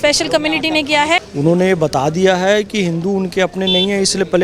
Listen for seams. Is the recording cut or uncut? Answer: cut